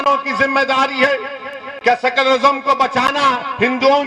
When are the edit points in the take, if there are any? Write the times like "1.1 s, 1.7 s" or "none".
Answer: none